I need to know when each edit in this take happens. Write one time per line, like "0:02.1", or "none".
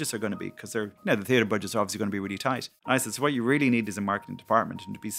0:00.9
0:02.7